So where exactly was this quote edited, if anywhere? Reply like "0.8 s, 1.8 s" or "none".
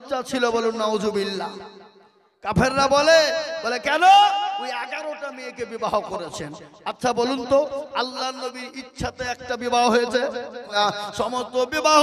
10.7 s